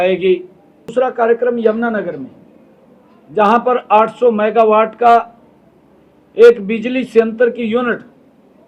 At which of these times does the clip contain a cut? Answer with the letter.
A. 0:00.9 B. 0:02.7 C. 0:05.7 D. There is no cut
A